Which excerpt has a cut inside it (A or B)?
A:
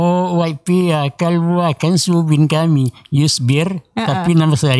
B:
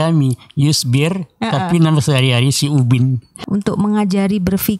B